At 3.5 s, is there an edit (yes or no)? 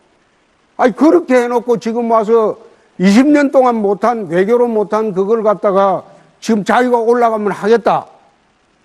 no